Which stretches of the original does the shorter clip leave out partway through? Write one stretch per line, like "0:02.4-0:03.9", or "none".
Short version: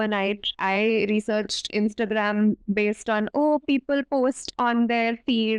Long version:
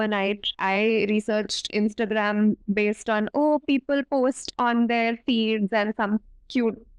none